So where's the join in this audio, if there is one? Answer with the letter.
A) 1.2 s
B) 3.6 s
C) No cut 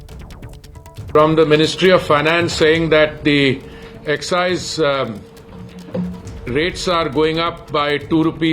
A